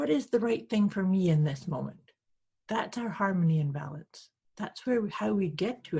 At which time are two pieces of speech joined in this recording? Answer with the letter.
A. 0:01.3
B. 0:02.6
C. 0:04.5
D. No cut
D